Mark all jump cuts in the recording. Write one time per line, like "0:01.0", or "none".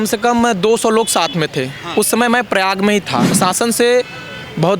0:03.3